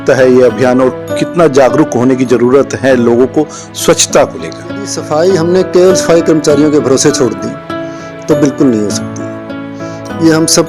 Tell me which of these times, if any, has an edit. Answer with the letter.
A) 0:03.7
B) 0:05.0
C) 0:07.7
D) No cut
B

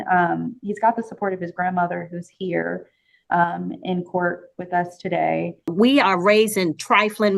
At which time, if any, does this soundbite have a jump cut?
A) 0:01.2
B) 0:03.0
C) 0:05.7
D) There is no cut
C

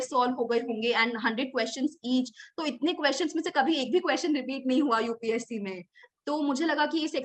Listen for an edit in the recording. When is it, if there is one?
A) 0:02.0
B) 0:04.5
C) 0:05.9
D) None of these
D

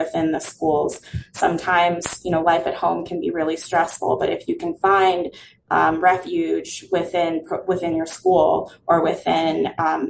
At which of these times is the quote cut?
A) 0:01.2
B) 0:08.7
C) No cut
C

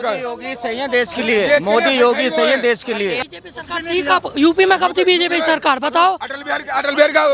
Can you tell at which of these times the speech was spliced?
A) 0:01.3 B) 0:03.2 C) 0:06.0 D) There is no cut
B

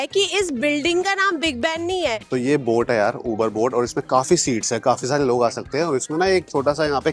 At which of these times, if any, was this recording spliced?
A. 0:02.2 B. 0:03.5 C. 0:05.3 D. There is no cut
A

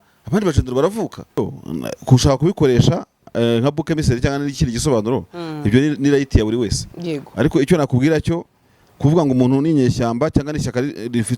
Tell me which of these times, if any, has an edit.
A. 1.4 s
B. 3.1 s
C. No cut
A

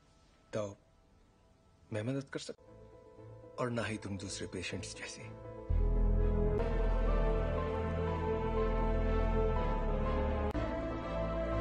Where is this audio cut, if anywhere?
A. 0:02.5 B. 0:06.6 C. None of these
B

